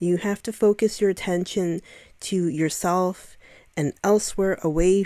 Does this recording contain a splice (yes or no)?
no